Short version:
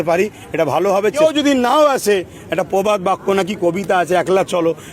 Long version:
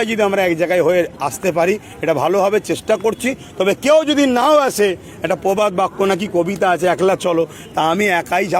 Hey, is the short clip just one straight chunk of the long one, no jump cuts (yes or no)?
no